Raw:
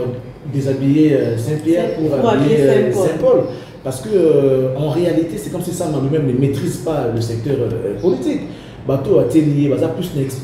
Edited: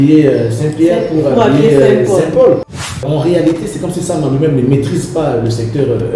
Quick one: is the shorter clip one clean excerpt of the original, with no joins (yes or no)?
no